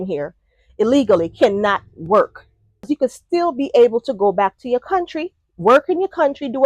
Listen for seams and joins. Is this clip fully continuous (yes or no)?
no